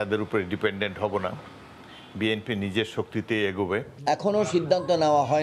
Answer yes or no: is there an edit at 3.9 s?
yes